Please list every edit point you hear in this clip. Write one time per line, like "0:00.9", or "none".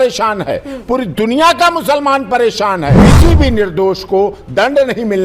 0:03.1